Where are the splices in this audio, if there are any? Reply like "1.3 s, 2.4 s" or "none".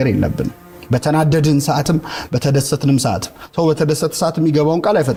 none